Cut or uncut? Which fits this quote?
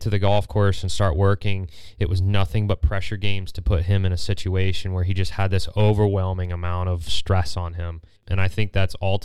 cut